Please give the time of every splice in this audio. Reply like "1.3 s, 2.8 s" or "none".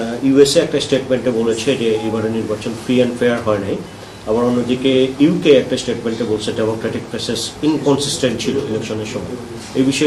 none